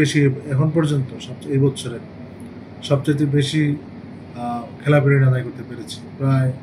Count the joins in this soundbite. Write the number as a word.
zero